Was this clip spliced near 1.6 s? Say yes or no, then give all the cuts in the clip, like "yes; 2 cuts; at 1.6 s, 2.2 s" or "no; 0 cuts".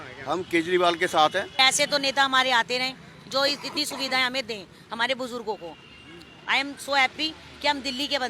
yes; 1 cut; at 1.6 s